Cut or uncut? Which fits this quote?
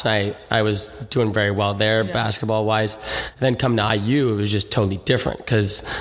uncut